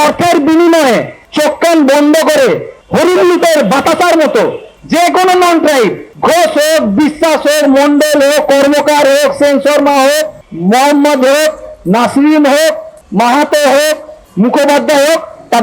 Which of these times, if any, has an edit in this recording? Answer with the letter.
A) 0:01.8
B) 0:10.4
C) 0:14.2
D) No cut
C